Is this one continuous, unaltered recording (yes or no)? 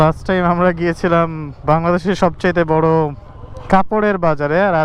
yes